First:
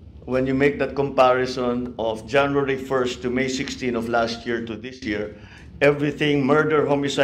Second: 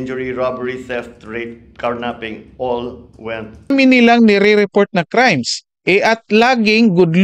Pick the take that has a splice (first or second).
second